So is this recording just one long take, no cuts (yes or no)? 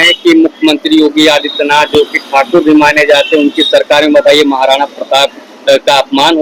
yes